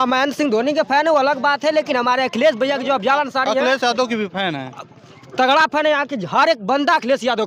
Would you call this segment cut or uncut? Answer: uncut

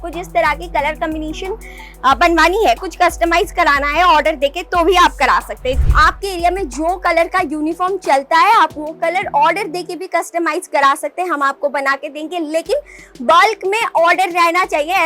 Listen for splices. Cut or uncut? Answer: cut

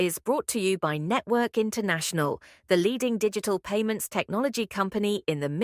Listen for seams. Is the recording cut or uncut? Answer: uncut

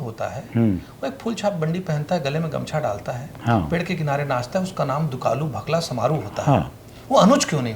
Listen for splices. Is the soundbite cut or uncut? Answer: uncut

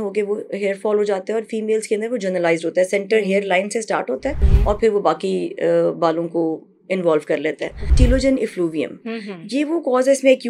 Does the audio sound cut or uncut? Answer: cut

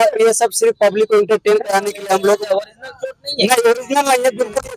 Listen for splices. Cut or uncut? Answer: uncut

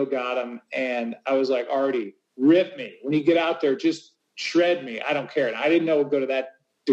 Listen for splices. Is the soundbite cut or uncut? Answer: uncut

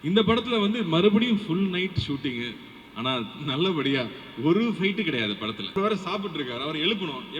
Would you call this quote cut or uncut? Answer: cut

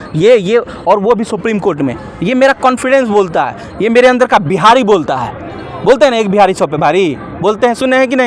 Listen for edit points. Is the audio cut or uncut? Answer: uncut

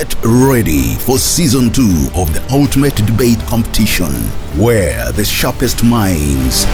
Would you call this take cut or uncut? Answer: uncut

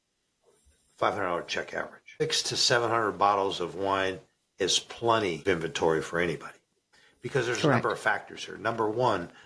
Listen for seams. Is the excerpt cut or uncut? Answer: cut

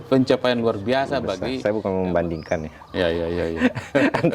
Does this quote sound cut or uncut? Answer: cut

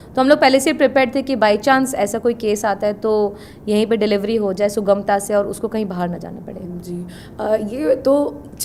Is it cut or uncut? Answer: uncut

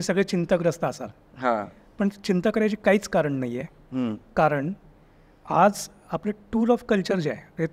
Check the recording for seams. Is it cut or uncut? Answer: uncut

